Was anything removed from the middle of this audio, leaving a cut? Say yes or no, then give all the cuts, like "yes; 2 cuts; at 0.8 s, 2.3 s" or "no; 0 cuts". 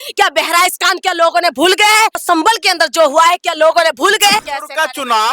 yes; 2 cuts; at 2.2 s, 4.4 s